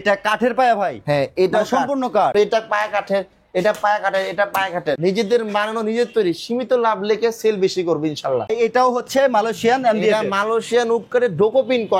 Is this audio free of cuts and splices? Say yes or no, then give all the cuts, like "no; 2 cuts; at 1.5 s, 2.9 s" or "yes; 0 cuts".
no; 3 cuts; at 2.3 s, 5.0 s, 8.5 s